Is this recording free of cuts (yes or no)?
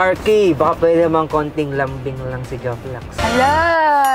yes